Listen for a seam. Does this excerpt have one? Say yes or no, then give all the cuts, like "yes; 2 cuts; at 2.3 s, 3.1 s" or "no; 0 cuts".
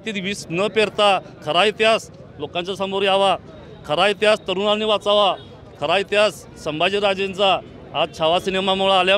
no; 0 cuts